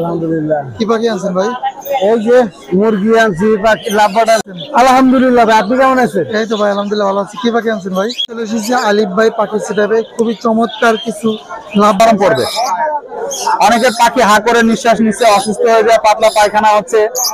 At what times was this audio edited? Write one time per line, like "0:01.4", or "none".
0:04.4
0:08.2
0:12.0